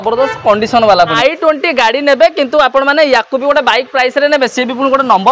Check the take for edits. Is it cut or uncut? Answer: cut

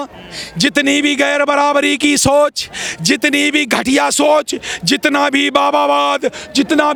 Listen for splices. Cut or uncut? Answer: uncut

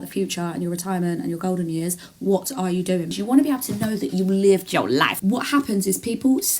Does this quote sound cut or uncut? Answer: cut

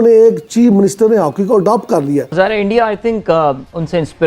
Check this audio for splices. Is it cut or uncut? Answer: cut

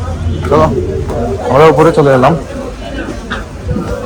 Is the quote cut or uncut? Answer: uncut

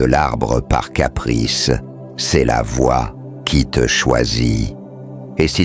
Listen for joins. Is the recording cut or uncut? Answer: uncut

